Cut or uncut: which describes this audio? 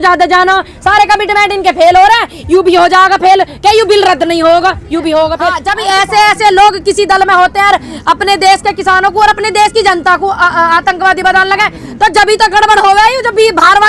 cut